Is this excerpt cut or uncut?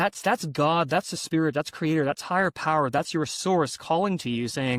uncut